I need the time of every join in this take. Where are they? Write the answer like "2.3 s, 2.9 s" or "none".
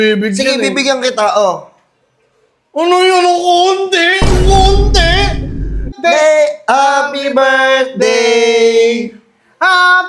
5.9 s